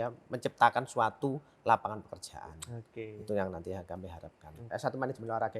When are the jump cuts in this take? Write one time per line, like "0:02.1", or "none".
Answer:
0:04.7